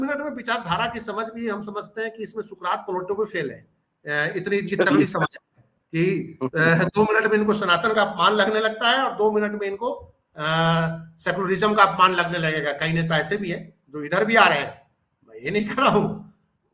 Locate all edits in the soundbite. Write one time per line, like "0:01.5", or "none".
none